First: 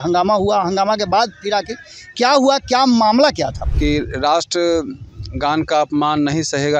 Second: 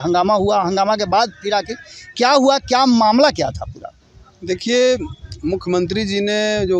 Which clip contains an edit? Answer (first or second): first